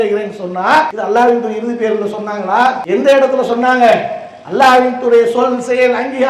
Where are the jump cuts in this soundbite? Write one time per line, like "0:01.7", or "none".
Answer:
0:01.0
0:02.8